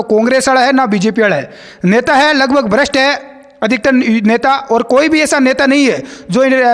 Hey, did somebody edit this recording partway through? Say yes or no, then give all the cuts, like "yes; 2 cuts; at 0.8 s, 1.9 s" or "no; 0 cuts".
no; 0 cuts